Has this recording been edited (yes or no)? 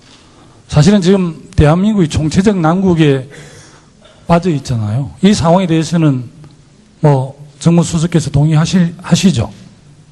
yes